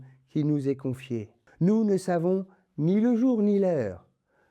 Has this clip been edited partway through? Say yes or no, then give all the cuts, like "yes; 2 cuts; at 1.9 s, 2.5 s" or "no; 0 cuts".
yes; 1 cut; at 1.4 s